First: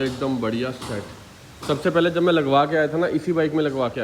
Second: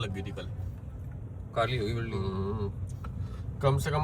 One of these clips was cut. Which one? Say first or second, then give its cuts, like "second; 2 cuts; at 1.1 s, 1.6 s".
second; 1 cut; at 1.2 s